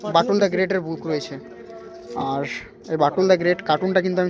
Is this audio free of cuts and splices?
yes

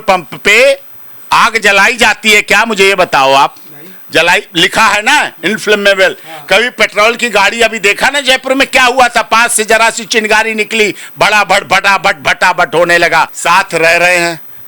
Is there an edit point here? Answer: yes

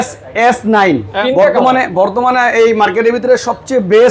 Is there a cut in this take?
yes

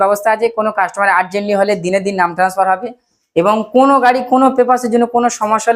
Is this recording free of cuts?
yes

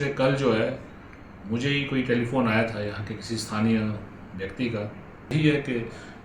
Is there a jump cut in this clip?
yes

